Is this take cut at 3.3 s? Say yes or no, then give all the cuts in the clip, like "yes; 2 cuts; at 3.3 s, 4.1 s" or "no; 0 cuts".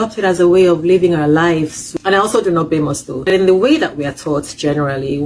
yes; 2 cuts; at 1.8 s, 3.3 s